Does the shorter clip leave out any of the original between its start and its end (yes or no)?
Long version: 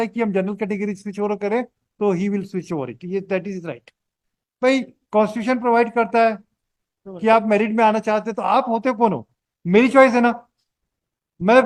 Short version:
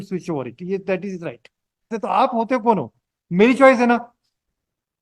yes